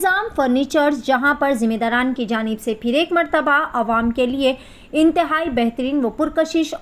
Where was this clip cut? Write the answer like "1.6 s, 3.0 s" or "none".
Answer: none